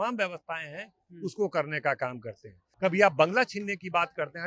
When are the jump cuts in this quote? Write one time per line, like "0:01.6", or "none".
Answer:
0:02.6